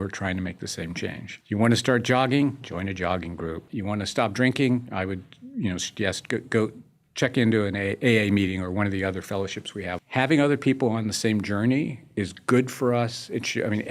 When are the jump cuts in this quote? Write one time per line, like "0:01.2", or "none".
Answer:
0:01.3
0:03.7
0:10.0